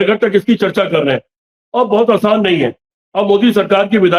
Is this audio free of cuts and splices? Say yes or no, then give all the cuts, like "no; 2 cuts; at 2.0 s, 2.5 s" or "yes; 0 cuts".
yes; 0 cuts